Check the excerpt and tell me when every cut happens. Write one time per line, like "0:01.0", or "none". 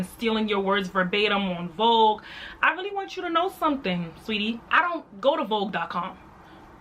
0:04.6